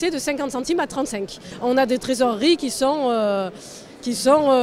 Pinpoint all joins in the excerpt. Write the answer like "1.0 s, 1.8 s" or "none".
1.4 s